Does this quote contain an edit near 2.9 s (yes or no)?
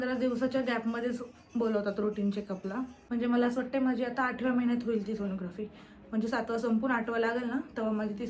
yes